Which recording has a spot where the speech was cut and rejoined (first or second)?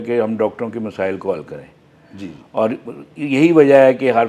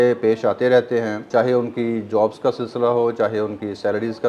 second